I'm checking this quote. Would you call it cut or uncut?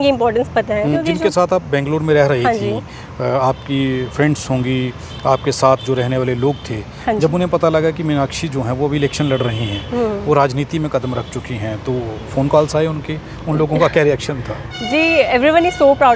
cut